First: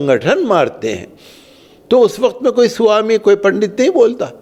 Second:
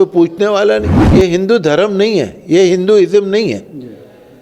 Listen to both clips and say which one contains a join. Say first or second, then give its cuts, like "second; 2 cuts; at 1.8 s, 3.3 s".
second; 1 cut; at 1.0 s